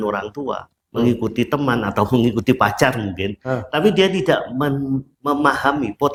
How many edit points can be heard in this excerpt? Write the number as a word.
zero